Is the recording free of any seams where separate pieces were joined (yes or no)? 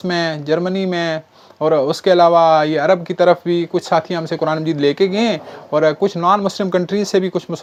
yes